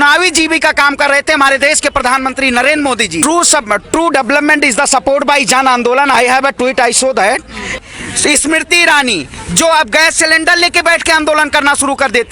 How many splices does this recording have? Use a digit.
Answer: 2